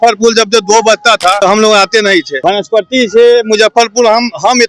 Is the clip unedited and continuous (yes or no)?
no